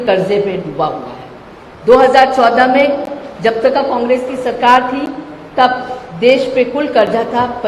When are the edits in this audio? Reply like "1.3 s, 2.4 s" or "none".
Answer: none

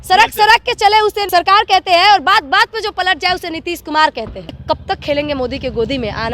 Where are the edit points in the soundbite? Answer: 1.3 s, 4.6 s

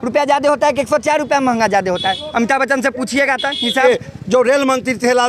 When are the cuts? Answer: 3.8 s

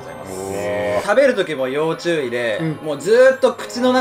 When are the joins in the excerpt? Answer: 1.0 s

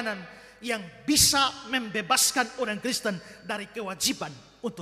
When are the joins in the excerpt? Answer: none

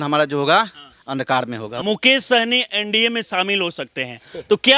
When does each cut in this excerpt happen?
1.7 s

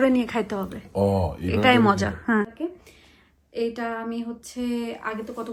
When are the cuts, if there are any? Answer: 2.4 s

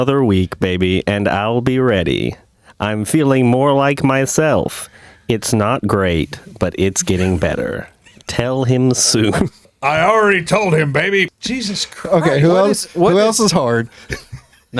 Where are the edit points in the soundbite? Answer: 9.7 s, 11.3 s

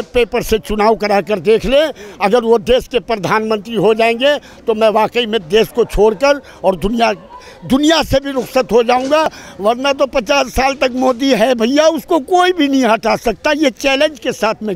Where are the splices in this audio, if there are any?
9.4 s

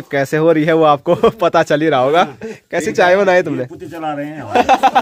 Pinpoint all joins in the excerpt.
none

